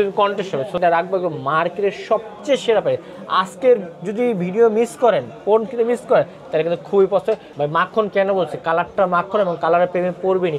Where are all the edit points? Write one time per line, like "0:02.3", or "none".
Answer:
0:00.8
0:07.5